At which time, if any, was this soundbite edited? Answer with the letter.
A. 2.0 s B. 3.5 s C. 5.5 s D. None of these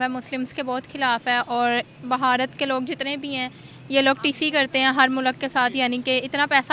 D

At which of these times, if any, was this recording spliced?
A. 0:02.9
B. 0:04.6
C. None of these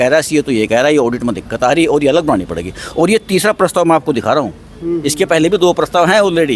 C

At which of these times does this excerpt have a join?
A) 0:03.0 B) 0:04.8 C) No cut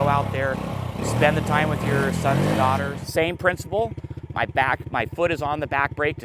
A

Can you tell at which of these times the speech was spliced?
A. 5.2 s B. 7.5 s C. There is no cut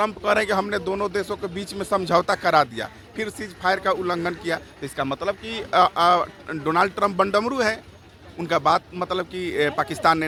C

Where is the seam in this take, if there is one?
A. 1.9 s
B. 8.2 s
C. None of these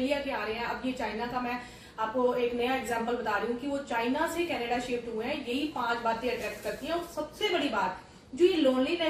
C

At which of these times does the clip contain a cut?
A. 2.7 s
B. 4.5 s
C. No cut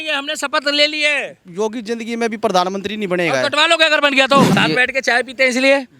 B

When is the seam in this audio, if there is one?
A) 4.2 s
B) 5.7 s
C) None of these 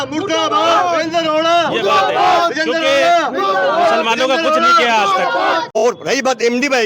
B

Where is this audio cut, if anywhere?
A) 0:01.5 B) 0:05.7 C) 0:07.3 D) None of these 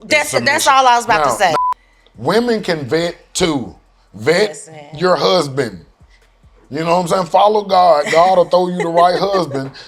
A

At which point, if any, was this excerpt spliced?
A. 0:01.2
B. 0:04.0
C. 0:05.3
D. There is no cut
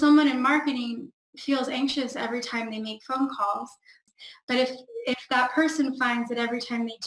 B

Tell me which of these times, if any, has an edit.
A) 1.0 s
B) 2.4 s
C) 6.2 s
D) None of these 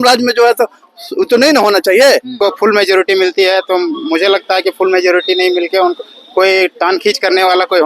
B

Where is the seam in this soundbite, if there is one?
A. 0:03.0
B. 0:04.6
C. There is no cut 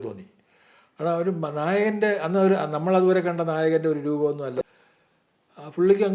B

